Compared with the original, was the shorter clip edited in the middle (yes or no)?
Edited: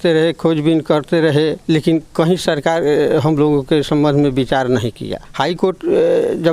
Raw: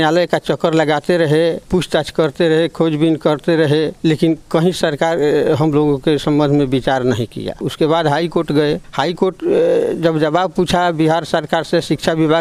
yes